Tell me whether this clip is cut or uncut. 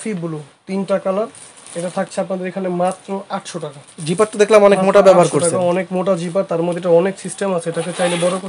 uncut